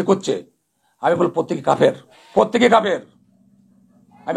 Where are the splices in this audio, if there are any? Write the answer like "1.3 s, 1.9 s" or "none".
2.1 s